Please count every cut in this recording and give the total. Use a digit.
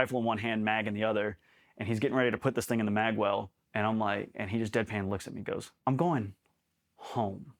2